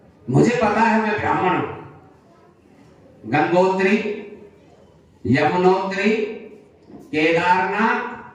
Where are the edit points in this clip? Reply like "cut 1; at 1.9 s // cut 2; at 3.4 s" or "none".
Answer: none